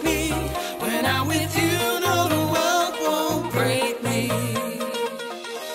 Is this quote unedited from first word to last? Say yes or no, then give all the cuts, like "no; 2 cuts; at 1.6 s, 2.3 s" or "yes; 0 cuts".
yes; 0 cuts